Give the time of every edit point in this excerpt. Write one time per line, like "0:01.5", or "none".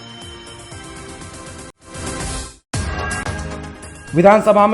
0:01.7